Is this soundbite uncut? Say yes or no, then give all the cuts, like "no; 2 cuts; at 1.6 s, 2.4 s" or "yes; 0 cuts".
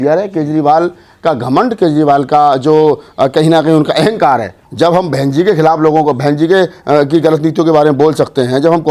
no; 1 cut; at 4.6 s